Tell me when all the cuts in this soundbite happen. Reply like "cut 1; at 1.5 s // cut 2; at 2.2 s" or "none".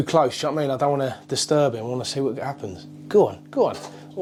none